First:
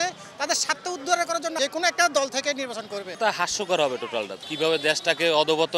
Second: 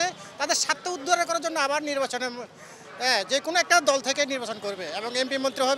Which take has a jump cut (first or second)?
first